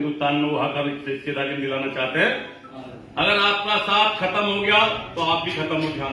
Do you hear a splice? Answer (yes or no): yes